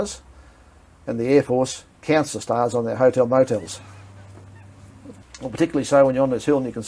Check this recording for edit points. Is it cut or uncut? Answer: cut